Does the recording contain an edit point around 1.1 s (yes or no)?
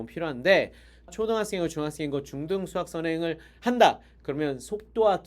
yes